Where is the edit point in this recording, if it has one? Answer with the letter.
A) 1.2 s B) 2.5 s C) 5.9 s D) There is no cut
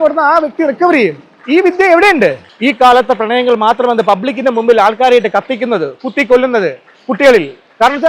B